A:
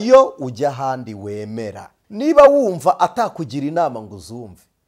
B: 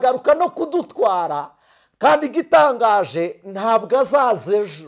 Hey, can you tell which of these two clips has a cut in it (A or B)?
A